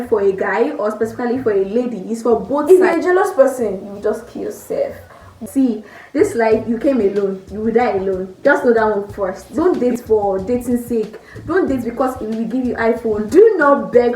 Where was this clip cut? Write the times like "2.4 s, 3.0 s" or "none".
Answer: 2.6 s, 5.4 s, 9.4 s, 13.3 s

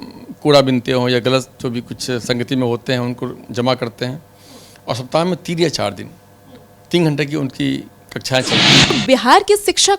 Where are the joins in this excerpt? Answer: 8.9 s

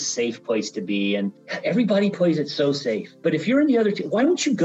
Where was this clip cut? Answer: 1.5 s, 3.1 s

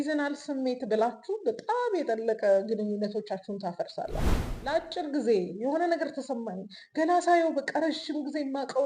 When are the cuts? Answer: 4.4 s

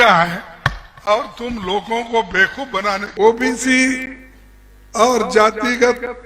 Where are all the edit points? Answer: 3.1 s

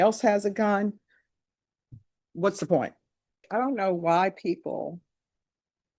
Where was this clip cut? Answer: 3.4 s

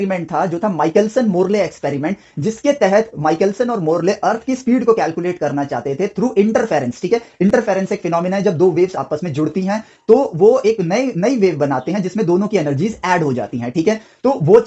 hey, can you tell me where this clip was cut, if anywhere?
none

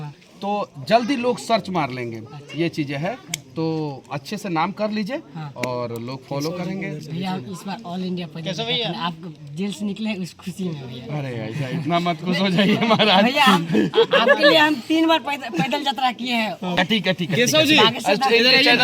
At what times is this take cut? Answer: 16.8 s

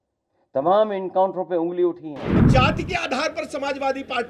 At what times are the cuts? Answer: 2.4 s

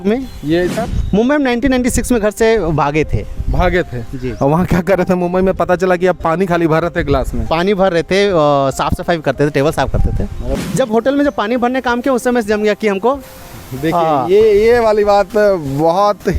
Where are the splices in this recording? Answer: 0.8 s, 10.4 s

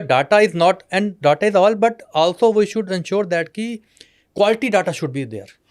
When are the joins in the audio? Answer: none

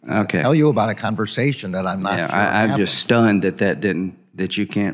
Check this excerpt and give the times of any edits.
none

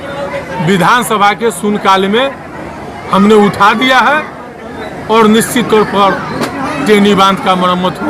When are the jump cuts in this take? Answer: none

